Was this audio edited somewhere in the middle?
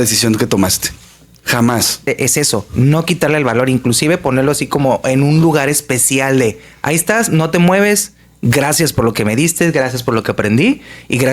yes; 1 cut; at 2.0 s

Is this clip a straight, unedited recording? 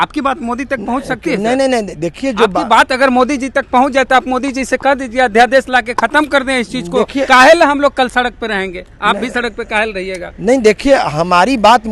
yes; 0 cuts

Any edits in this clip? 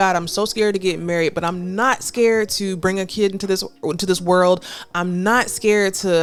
no; 0 cuts

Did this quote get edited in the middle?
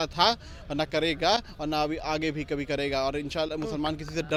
no; 0 cuts

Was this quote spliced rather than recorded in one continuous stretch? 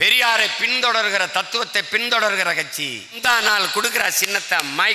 yes; 1 cut; at 3.2 s

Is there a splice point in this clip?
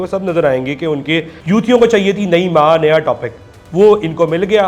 yes; 1 cut; at 1.3 s

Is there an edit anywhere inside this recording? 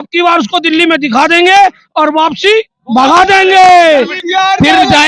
yes; 1 cut; at 4.2 s

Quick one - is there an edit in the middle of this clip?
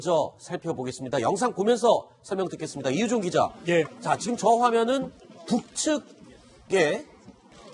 yes; 1 cut; at 5.7 s

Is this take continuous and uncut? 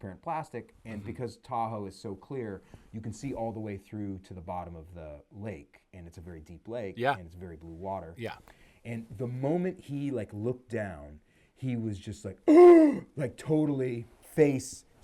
yes; 0 cuts

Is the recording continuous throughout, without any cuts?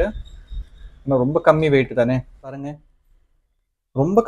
no; 1 cut; at 2.6 s

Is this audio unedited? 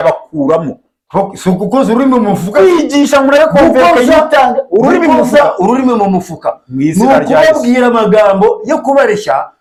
yes; 0 cuts

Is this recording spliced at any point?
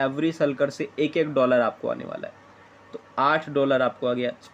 no; 0 cuts

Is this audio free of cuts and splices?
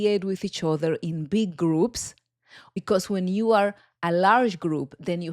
no; 1 cut; at 2.2 s

